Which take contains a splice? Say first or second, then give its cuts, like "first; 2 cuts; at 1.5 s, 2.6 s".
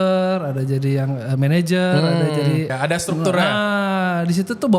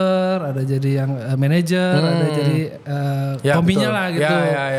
first; 1 cut; at 2.7 s